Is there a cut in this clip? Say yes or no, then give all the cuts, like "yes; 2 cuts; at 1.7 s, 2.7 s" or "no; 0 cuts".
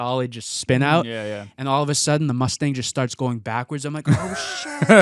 no; 0 cuts